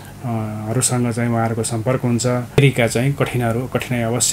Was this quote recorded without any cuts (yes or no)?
no